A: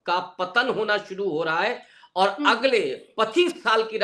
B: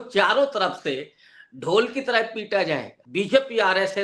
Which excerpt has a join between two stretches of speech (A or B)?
B